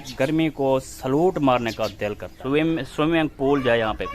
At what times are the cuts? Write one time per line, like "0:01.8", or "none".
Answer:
0:02.3